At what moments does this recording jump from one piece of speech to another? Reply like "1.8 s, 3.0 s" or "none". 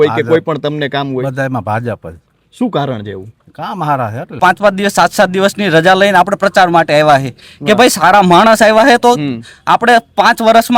4.4 s